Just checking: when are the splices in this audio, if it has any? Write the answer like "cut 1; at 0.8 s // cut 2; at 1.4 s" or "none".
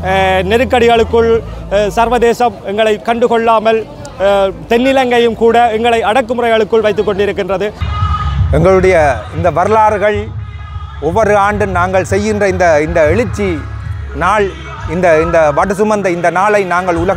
cut 1; at 7.8 s